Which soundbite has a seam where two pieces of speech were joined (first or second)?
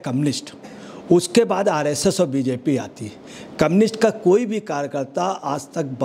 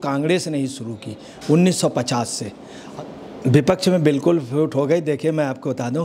second